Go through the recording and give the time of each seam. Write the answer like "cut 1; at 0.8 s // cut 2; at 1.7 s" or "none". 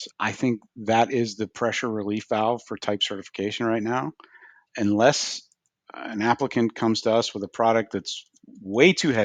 none

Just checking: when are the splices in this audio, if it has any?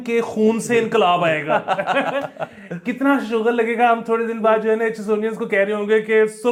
none

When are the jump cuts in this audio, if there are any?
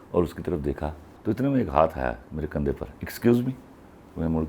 cut 1; at 1.1 s

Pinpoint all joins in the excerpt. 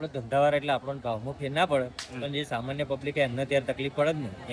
none

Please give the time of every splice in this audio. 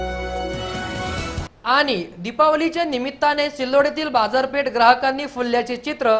cut 1; at 1.4 s

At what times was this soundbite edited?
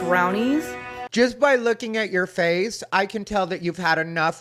none

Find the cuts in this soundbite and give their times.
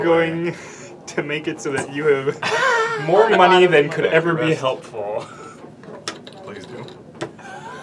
none

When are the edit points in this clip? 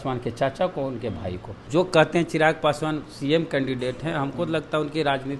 cut 1; at 1.6 s

